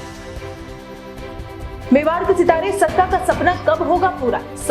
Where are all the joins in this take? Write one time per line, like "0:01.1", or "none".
0:00.9